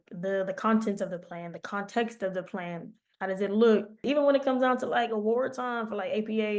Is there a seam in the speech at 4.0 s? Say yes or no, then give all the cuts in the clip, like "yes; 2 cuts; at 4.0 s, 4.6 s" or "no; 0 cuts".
yes; 1 cut; at 4.0 s